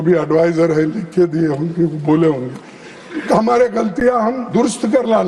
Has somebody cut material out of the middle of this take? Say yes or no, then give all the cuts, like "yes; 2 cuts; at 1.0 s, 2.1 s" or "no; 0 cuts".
no; 0 cuts